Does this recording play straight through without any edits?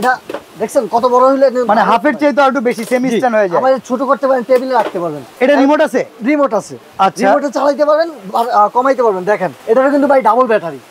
no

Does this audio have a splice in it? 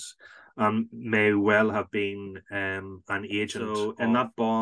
yes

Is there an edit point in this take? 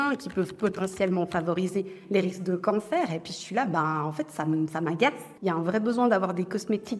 yes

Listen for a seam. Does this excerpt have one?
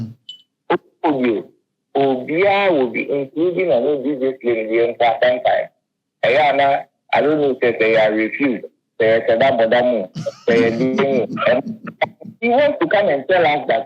yes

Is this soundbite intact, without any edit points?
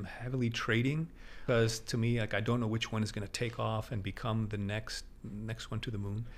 no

